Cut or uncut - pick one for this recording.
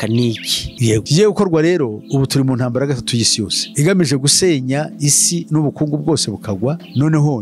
uncut